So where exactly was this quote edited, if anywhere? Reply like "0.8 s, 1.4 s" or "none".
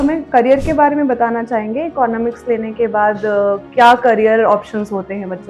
none